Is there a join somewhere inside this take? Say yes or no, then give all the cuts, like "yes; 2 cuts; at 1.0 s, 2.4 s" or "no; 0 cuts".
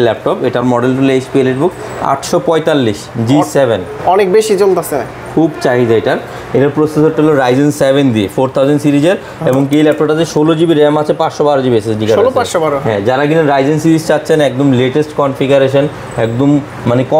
no; 0 cuts